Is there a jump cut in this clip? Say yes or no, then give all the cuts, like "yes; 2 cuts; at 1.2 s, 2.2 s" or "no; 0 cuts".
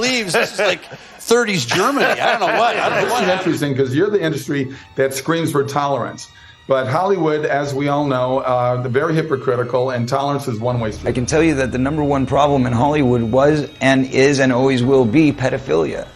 yes; 2 cuts; at 3.2 s, 10.9 s